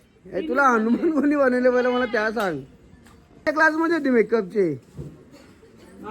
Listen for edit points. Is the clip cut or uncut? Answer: cut